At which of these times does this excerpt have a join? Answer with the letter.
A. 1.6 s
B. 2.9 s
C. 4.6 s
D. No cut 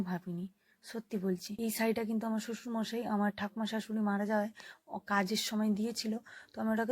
A